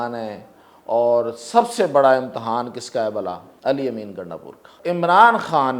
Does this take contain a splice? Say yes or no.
yes